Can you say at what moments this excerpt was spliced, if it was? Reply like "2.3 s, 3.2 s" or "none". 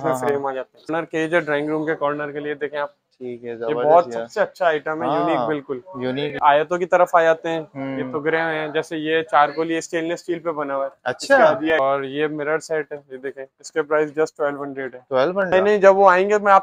0.9 s, 6.3 s, 11.7 s, 15.5 s